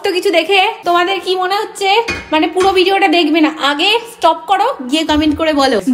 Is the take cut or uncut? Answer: uncut